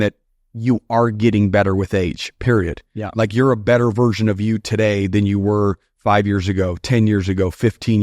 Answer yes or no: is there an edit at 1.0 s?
no